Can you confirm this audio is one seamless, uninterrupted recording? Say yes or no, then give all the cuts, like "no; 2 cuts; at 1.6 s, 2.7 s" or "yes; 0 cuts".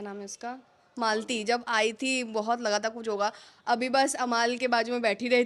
yes; 0 cuts